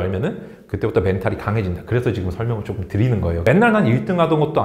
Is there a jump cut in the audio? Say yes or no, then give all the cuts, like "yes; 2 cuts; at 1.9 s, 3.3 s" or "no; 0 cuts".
yes; 1 cut; at 3.4 s